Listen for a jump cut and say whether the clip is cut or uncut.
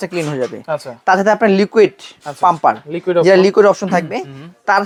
uncut